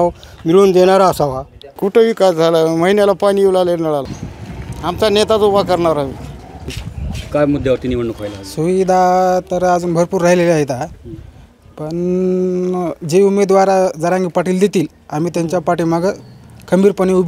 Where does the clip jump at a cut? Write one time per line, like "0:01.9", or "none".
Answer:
0:04.1